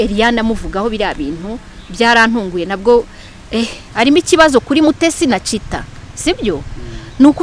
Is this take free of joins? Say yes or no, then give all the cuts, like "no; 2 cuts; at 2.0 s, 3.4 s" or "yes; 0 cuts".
no; 1 cut; at 3.8 s